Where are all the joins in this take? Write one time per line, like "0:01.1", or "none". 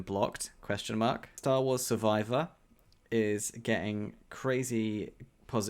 0:01.3